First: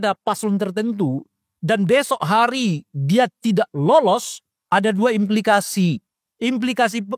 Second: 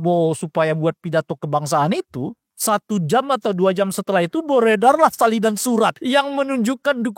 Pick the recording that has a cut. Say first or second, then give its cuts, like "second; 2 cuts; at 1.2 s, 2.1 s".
second; 2 cuts; at 2.4 s, 6.0 s